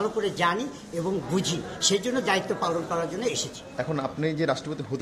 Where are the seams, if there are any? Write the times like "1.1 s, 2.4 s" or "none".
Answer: 3.7 s